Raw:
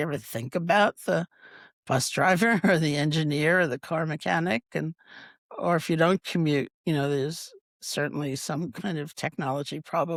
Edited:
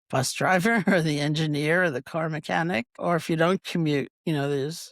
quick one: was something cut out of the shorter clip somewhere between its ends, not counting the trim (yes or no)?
yes